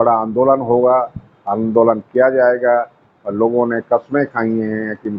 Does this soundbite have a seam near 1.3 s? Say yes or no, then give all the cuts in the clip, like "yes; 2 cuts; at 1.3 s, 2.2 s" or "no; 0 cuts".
no; 0 cuts